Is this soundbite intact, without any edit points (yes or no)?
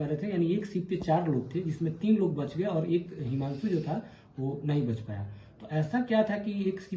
yes